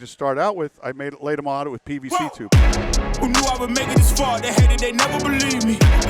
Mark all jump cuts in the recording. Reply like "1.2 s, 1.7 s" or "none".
2.1 s